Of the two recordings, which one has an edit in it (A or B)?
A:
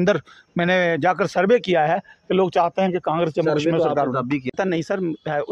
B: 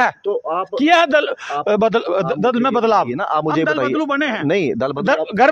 A